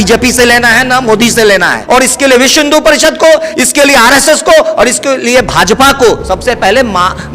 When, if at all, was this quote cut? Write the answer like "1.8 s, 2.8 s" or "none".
1.8 s